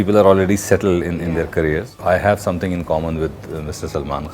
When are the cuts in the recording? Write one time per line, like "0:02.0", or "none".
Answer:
0:02.0